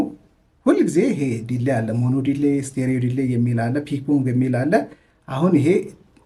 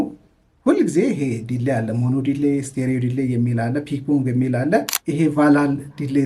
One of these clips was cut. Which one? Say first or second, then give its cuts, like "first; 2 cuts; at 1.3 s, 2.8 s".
second; 1 cut; at 4.9 s